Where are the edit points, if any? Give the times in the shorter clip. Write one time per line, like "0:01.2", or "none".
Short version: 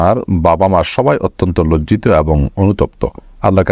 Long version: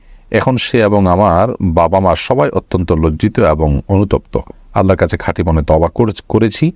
none

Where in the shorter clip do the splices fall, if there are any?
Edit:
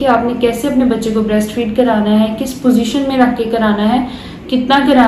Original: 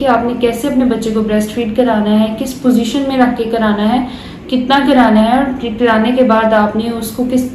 none

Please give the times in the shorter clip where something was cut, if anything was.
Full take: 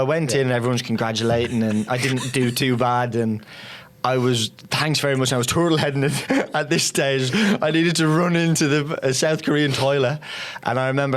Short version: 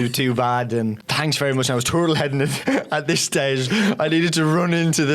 0:01.1

